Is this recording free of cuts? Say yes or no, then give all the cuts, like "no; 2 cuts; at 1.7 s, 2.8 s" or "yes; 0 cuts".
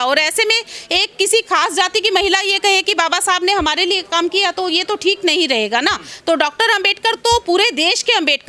yes; 0 cuts